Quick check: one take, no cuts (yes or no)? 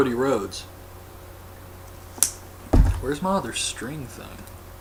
yes